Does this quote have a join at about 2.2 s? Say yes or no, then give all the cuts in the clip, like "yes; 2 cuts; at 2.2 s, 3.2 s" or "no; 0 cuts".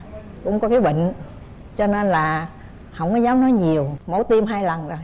no; 1 cut; at 4.0 s